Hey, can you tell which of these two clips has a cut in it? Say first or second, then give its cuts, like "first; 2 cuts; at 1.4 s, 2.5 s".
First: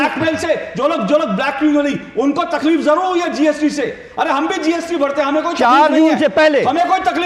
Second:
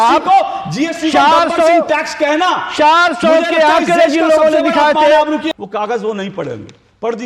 second; 1 cut; at 5.4 s